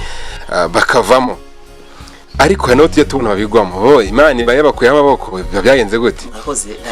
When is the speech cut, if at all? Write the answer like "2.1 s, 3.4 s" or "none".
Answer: none